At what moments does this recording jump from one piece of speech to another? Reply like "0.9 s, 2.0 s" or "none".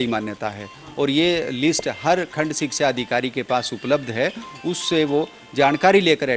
none